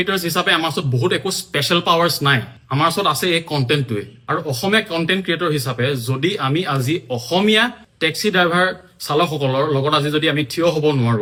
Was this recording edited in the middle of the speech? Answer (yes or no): no